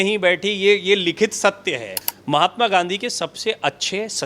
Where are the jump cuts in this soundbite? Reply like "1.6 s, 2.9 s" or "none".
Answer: 2.0 s